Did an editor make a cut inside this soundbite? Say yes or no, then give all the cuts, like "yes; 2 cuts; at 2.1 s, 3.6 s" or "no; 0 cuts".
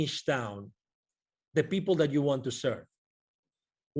no; 0 cuts